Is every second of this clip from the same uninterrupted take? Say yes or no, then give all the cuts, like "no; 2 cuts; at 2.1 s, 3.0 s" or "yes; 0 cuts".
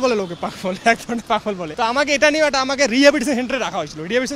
no; 1 cut; at 1.7 s